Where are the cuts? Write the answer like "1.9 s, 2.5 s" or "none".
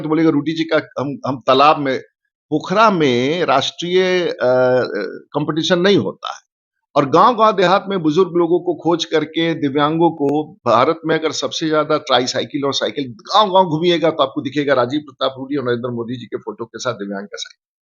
none